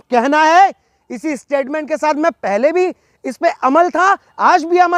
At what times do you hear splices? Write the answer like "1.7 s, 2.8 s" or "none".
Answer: none

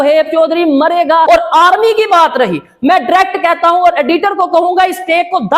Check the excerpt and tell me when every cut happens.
1.3 s

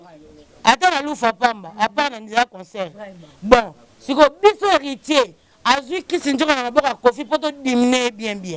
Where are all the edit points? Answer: none

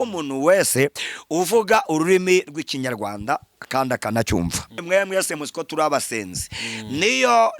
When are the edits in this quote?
4.8 s

